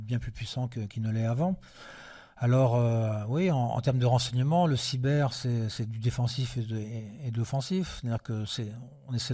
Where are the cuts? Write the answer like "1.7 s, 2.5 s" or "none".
none